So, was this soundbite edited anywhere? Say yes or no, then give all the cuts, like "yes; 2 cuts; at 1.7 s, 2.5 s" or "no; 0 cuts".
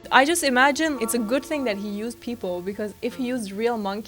yes; 1 cut; at 1.0 s